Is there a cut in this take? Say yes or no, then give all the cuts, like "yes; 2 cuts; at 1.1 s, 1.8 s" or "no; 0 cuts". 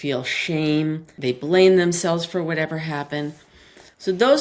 yes; 1 cut; at 1.1 s